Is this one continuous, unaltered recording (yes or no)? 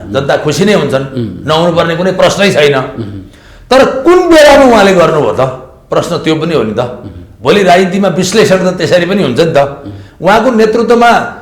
yes